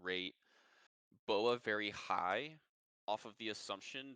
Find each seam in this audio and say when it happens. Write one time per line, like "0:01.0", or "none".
none